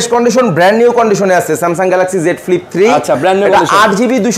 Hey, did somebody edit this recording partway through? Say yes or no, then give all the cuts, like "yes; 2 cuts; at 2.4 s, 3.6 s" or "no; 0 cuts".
no; 0 cuts